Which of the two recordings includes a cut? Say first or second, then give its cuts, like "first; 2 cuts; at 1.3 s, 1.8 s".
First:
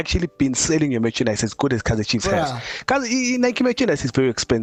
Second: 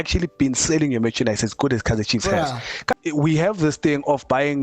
second; 1 cut; at 2.9 s